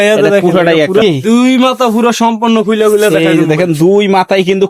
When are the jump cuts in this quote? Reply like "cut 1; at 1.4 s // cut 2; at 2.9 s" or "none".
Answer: cut 1; at 1.0 s